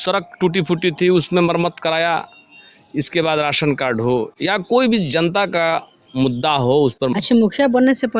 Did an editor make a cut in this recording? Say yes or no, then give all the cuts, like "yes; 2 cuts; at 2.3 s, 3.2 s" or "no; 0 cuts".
yes; 1 cut; at 7.1 s